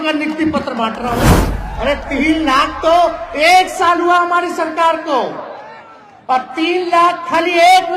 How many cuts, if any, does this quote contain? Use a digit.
1